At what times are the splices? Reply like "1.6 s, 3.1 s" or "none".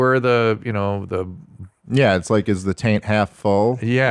1.8 s